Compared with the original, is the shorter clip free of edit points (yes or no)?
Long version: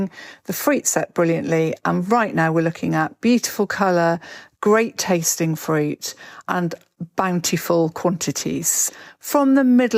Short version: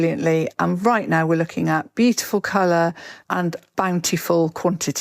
no